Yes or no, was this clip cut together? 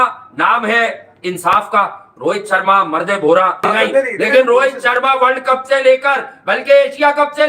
yes